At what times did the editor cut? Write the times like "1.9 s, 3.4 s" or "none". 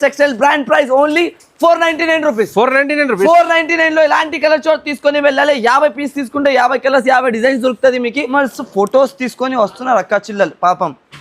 8.3 s